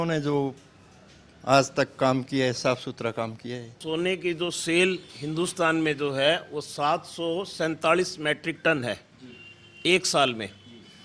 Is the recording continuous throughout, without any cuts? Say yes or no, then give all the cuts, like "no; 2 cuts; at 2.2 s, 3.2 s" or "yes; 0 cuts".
no; 1 cut; at 3.8 s